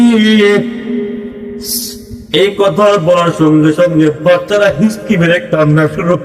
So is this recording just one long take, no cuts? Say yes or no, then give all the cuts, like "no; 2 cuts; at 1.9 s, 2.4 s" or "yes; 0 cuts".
yes; 0 cuts